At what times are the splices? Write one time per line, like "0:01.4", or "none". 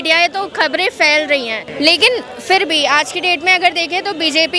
0:01.6